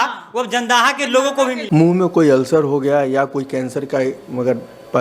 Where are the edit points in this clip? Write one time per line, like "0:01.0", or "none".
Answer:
0:01.6